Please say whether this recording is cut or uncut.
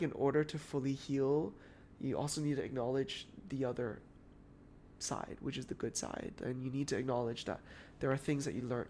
uncut